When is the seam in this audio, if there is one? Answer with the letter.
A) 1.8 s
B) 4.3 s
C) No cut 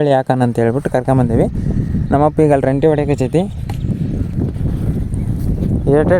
B